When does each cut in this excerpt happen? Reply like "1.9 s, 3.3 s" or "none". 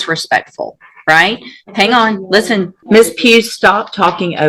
2.8 s

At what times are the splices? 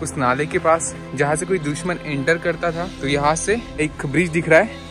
2.9 s, 3.8 s

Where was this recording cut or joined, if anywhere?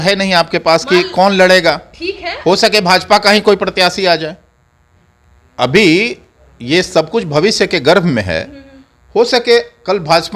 none

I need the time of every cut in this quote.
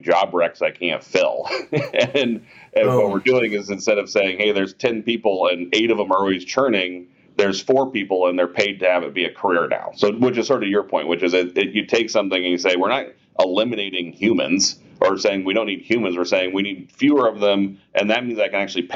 none

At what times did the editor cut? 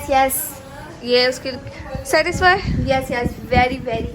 none

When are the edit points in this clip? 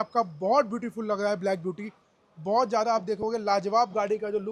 none

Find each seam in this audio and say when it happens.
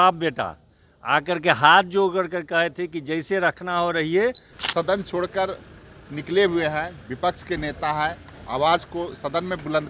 4.5 s

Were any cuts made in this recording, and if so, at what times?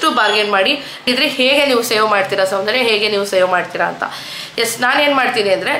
1.1 s

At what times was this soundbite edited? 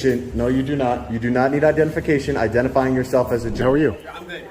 3.6 s

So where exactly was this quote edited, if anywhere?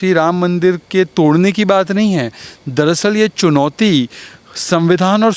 none

